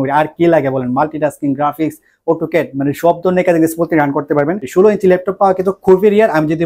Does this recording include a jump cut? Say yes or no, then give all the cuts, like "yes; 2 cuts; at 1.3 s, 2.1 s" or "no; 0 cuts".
yes; 1 cut; at 4.6 s